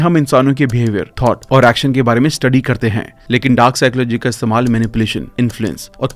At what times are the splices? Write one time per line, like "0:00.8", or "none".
none